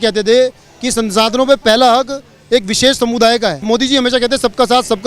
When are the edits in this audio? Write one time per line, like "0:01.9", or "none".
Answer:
0:03.6